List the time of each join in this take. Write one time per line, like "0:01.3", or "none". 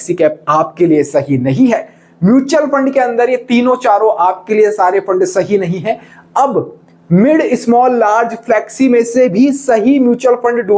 none